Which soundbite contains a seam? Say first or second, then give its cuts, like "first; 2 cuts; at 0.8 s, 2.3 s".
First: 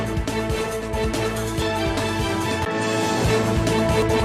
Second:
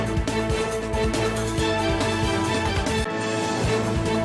second; 1 cut; at 1.6 s